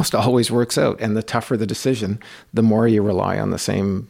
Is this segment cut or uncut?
uncut